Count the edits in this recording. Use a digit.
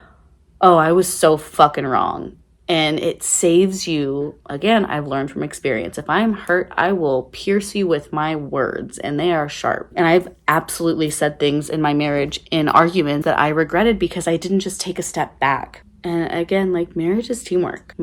2